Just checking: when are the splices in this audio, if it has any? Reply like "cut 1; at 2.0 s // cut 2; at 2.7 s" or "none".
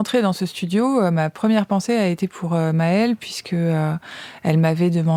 none